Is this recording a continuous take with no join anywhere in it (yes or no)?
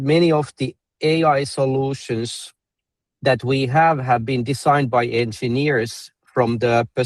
yes